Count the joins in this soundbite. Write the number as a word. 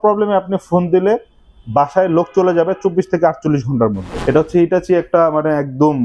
one